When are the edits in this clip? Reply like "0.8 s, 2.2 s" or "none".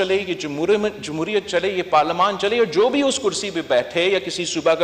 none